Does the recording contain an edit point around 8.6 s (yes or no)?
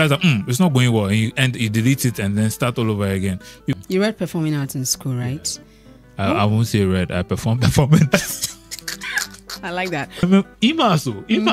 no